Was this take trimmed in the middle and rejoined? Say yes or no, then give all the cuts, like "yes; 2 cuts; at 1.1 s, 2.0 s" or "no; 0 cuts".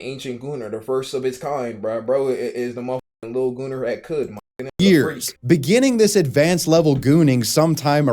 no; 0 cuts